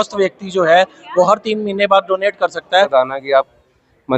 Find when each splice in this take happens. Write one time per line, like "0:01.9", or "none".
0:02.9